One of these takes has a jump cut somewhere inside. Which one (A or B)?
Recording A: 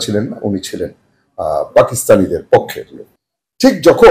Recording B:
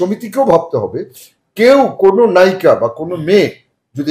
A